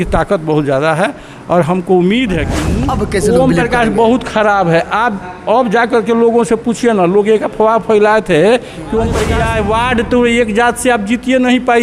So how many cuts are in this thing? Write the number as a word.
two